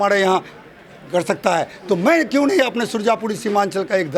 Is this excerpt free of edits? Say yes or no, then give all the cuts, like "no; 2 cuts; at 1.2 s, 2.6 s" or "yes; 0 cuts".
yes; 0 cuts